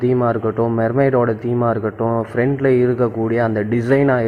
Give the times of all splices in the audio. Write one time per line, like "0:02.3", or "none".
none